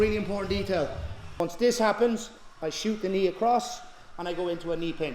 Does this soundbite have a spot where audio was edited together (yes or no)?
yes